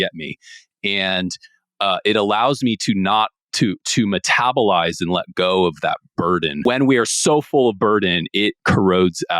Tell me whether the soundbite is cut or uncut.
cut